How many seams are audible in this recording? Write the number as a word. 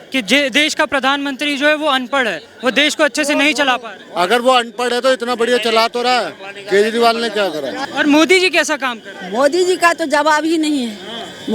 one